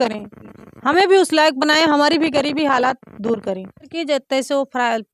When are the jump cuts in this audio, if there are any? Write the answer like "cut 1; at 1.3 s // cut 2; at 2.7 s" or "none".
cut 1; at 3.9 s